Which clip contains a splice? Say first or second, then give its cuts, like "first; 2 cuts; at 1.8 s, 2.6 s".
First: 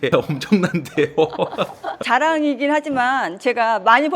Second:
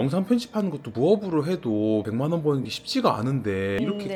first; 1 cut; at 1.9 s